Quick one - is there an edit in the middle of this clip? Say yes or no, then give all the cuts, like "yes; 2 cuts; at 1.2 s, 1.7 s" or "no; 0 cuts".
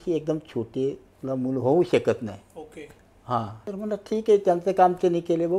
yes; 1 cut; at 3.6 s